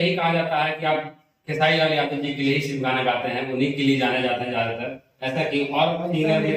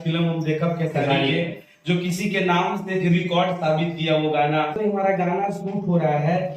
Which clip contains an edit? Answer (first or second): second